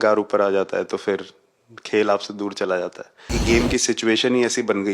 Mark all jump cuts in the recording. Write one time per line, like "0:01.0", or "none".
0:03.4